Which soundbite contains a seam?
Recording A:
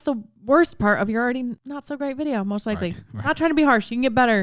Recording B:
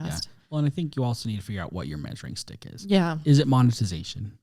A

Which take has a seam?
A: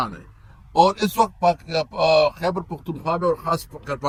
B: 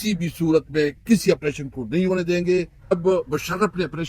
B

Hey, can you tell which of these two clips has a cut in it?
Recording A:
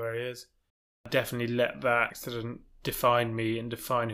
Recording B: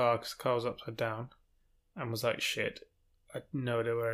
A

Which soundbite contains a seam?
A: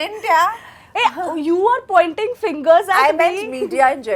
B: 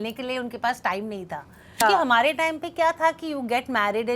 B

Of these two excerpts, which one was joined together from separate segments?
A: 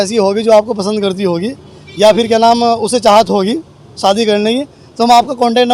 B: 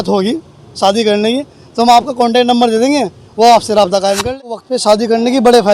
B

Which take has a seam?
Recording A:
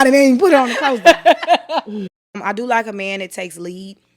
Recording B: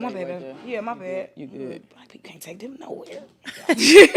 A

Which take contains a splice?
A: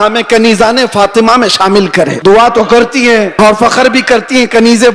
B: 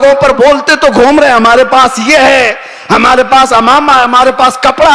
A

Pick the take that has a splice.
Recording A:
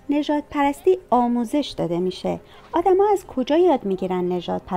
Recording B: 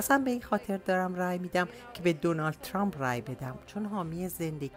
B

